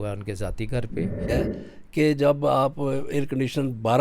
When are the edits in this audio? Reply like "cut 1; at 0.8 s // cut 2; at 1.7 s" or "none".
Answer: cut 1; at 1.4 s